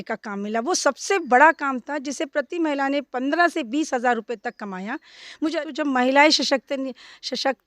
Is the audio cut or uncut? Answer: cut